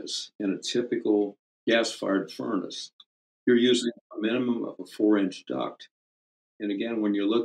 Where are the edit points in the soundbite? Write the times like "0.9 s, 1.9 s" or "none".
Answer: 1.5 s